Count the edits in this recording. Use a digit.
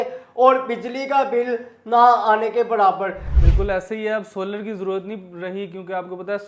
1